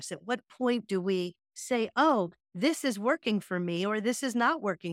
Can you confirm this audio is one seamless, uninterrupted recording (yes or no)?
yes